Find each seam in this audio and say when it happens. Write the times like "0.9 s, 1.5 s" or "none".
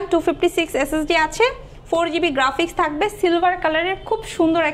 none